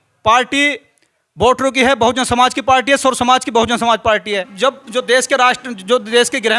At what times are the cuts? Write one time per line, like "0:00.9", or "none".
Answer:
0:04.5